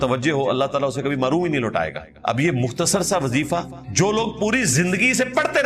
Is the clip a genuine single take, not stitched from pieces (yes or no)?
no